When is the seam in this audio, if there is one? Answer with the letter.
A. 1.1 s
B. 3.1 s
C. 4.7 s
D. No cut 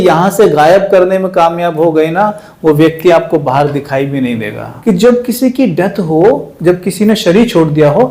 C